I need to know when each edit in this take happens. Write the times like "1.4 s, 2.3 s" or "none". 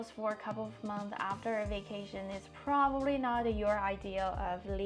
none